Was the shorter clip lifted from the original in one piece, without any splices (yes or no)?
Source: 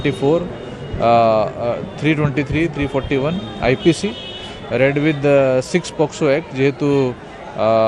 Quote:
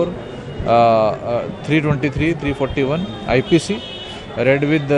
yes